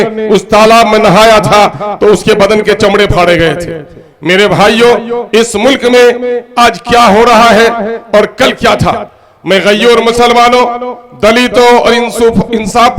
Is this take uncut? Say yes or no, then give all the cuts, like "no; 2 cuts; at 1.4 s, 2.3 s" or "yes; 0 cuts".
yes; 0 cuts